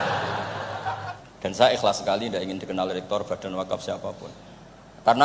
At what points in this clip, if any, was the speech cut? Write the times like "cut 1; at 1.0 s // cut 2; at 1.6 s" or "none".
cut 1; at 1.1 s